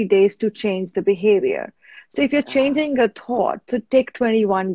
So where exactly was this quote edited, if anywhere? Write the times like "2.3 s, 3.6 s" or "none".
none